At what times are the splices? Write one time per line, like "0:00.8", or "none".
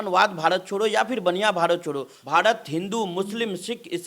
0:02.1